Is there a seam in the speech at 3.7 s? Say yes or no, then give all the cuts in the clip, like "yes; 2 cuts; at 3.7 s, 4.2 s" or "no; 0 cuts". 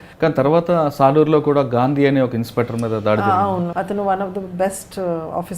yes; 1 cut; at 3.7 s